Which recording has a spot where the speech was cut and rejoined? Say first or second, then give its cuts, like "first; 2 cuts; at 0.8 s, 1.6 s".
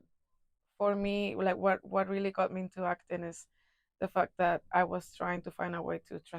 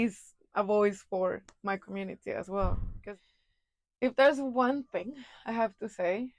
second; 1 cut; at 2.9 s